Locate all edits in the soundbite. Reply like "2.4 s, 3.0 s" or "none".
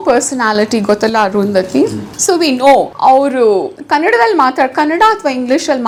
none